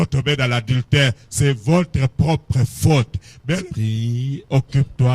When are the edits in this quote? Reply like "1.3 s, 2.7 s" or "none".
3.6 s

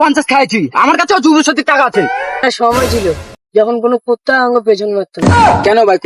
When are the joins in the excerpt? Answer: 2.4 s

